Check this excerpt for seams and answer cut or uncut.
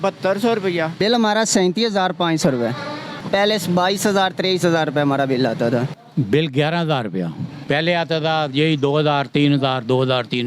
cut